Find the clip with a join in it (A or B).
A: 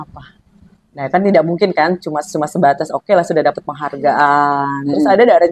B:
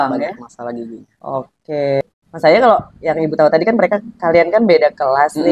B